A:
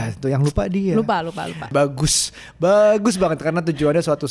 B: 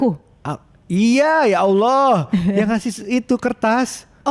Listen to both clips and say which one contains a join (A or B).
A